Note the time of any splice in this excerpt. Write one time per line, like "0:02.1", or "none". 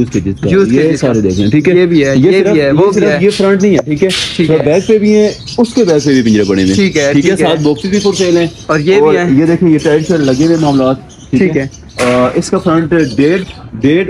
none